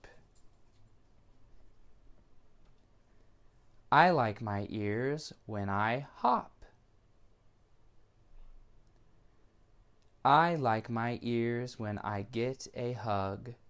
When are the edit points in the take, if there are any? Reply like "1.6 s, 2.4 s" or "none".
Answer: none